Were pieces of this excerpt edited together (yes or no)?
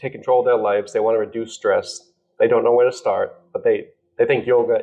no